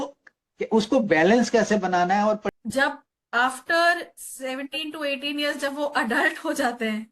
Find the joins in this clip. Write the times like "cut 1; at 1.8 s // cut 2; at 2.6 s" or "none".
cut 1; at 2.5 s

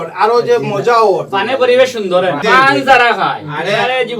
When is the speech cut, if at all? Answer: cut 1; at 2.4 s

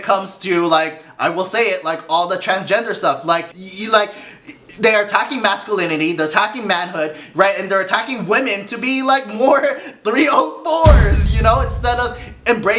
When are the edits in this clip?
cut 1; at 3.6 s

